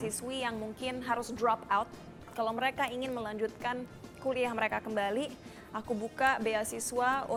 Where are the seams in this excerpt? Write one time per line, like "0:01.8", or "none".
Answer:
none